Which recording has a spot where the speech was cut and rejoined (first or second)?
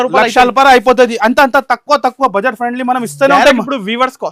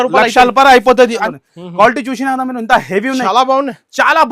second